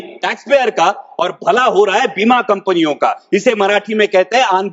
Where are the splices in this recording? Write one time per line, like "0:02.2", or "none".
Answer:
none